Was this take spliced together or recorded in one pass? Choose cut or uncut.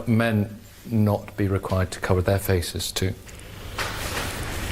uncut